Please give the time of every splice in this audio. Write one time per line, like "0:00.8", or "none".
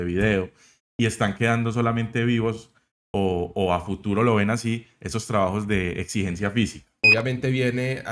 0:07.0

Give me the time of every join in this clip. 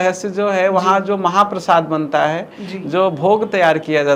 none

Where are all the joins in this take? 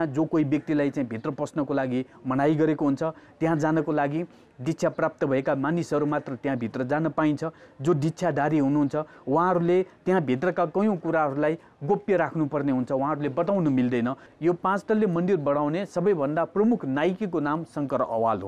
0:14.3

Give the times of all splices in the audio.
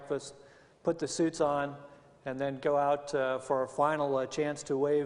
0:01.5

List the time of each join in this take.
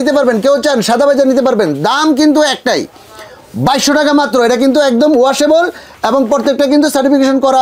none

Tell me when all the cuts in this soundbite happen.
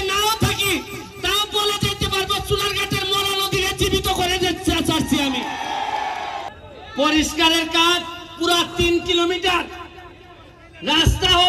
0:06.5

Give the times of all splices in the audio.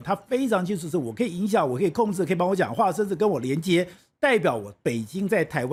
none

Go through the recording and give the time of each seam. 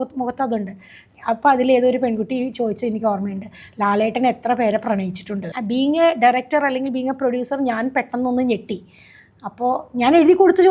0:05.5

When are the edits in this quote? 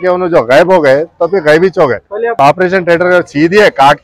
0:02.5

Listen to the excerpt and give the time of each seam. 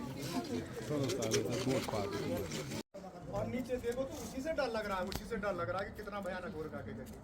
0:02.8

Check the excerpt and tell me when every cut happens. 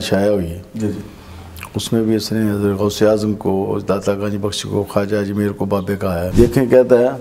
0:06.3

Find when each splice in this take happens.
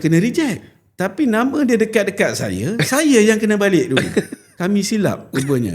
0:04.4

